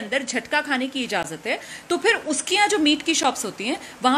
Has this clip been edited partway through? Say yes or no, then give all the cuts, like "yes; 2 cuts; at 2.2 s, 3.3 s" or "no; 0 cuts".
no; 0 cuts